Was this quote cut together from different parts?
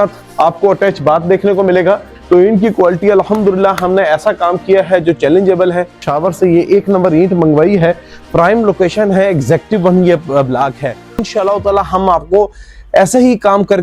yes; 4 cuts; at 2.1 s, 5.9 s, 8.2 s, 11.2 s

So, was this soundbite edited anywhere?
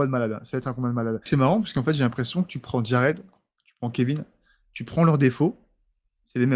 yes; 1 cut; at 1.2 s

